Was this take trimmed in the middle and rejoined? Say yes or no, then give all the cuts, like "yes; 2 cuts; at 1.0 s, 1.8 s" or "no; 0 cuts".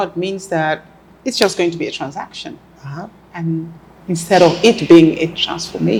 no; 0 cuts